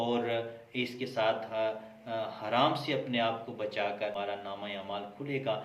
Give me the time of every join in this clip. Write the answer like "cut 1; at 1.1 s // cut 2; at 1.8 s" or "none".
cut 1; at 4.1 s